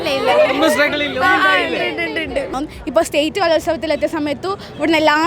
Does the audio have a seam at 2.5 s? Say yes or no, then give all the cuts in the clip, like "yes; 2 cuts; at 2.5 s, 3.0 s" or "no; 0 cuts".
yes; 1 cut; at 2.5 s